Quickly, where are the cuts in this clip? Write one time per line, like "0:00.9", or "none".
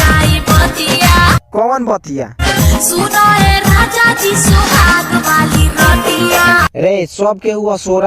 none